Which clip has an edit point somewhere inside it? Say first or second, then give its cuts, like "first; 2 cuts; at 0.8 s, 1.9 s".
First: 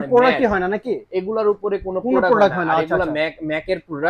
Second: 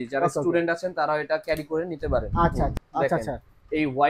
second; 1 cut; at 2.8 s